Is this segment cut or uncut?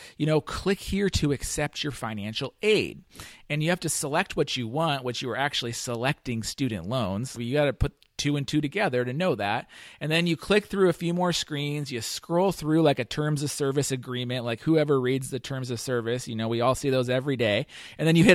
cut